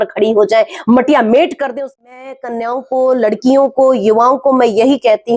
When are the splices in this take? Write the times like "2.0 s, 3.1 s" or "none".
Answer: 1.9 s